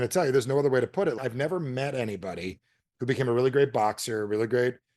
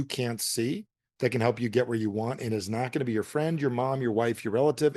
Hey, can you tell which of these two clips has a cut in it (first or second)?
first